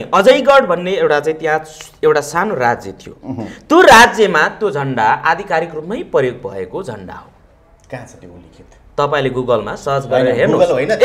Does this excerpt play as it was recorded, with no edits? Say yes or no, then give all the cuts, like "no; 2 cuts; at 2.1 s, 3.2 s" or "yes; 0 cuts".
yes; 0 cuts